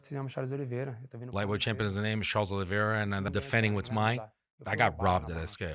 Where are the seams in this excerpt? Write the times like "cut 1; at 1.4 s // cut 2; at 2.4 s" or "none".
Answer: cut 1; at 1.0 s